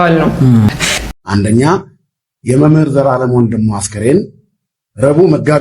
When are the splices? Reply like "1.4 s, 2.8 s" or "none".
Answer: 1.0 s